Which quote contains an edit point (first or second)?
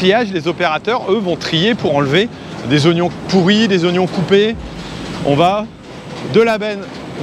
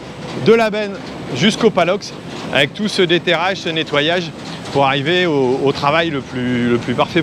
first